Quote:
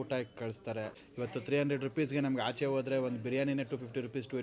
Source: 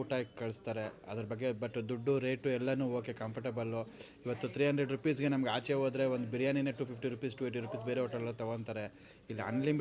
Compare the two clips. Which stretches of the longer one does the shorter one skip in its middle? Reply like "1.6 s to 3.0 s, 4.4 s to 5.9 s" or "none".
1.0 s to 4.1 s